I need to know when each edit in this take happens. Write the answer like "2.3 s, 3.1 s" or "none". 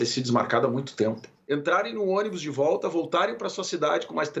1.3 s